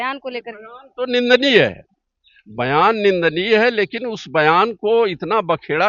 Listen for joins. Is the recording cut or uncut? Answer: uncut